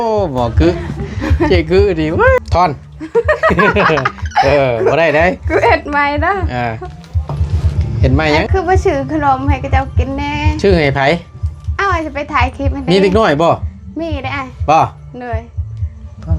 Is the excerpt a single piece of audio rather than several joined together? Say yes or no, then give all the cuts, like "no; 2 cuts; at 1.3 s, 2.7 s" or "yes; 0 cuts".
no; 2 cuts; at 2.4 s, 8.4 s